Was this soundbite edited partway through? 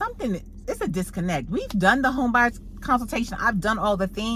no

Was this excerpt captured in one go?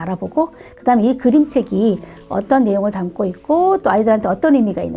yes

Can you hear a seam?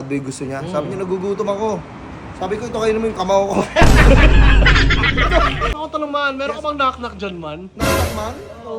yes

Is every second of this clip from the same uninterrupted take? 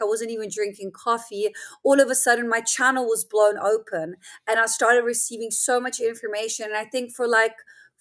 yes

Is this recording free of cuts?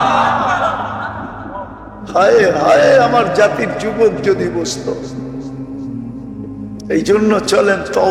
no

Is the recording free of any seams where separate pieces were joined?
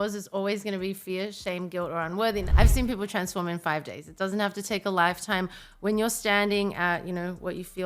no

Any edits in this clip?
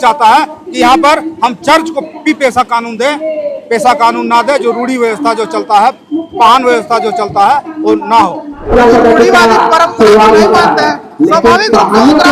yes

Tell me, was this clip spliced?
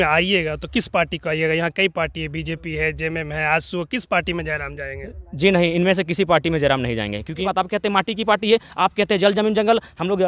yes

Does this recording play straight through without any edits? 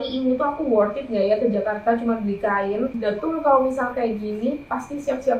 no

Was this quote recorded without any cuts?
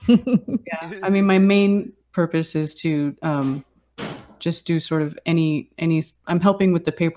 yes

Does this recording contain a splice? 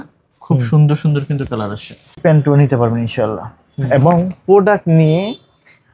yes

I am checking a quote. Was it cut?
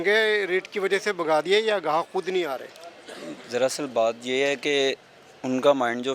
no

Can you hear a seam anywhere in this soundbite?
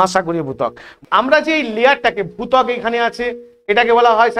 yes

